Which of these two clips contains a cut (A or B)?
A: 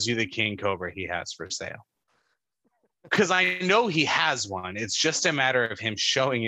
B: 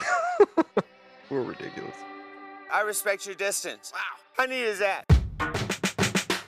B